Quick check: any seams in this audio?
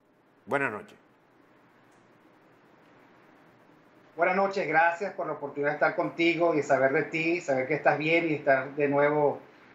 yes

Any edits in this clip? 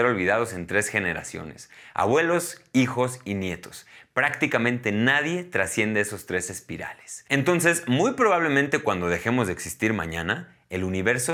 no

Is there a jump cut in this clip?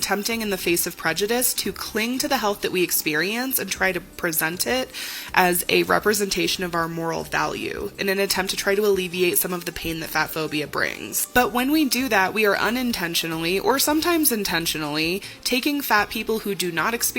no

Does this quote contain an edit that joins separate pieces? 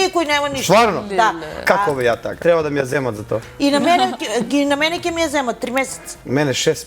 yes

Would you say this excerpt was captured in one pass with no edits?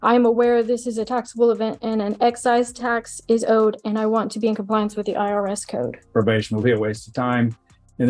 no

